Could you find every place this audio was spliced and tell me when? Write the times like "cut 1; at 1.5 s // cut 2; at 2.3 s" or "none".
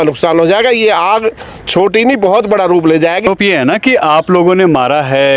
cut 1; at 3.2 s